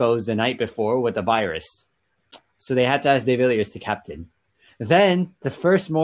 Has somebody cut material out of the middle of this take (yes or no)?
no